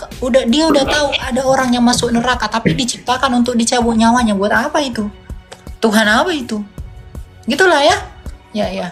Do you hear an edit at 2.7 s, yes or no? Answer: no